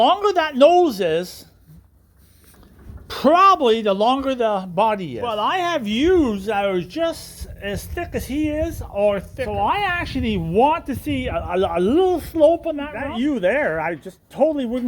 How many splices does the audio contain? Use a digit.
3